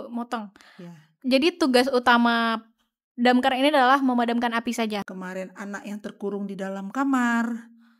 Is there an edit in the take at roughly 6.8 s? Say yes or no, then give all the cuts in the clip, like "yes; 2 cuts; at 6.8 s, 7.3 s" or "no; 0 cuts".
no; 1 cut; at 5.1 s